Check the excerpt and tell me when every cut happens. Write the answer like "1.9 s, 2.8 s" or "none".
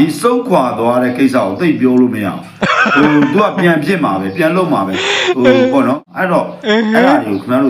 6.1 s